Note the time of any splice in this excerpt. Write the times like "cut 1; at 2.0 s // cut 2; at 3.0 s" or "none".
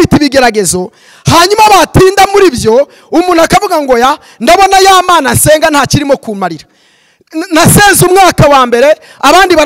none